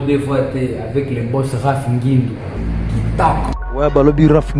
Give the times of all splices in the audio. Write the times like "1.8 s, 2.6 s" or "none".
2.5 s, 3.5 s